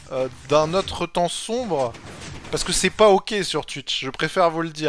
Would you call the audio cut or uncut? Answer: uncut